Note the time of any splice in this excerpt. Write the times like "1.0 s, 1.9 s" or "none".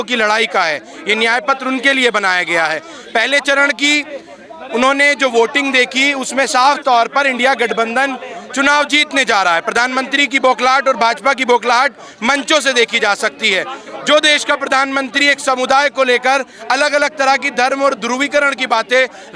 none